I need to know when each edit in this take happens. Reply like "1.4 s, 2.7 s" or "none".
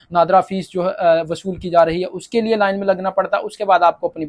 none

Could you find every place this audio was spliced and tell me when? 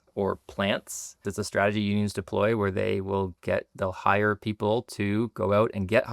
1.3 s

